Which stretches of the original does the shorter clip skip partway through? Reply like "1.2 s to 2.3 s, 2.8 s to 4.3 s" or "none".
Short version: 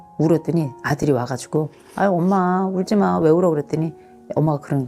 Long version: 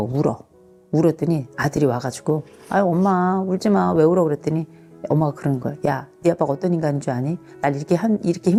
none